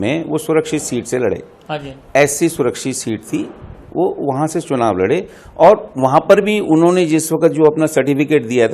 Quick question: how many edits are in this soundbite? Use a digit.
0